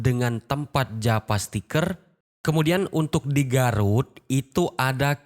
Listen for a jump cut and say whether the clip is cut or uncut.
cut